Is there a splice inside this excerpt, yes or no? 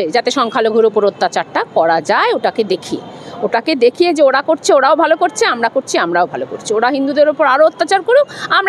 no